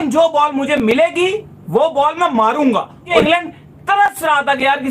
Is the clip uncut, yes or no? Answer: no